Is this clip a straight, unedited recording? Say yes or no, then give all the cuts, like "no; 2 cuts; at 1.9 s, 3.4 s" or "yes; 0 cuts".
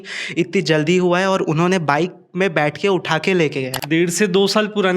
no; 1 cut; at 3.8 s